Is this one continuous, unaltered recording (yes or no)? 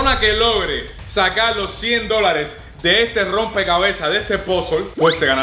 yes